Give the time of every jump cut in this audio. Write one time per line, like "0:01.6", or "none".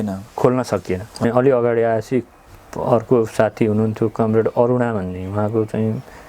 0:01.2